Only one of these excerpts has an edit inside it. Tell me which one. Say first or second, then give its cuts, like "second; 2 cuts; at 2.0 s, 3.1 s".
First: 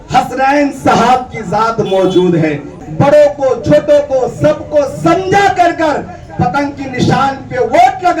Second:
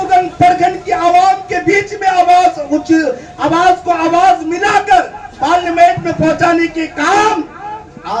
first; 1 cut; at 2.7 s